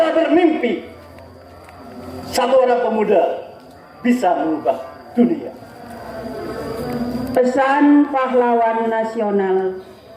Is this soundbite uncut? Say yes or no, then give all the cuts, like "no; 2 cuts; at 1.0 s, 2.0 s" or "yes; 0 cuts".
no; 1 cut; at 5.9 s